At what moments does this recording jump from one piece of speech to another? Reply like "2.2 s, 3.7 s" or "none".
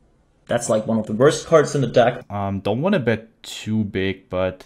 2.2 s

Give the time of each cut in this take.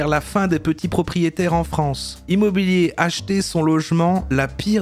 2.2 s

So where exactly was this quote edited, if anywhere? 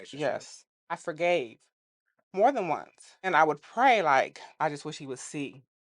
1.0 s, 3.3 s, 4.4 s

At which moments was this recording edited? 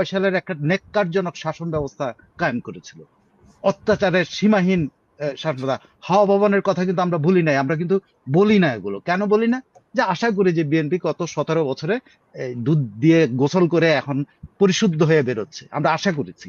none

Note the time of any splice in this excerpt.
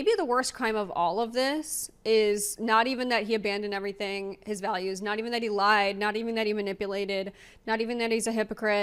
none

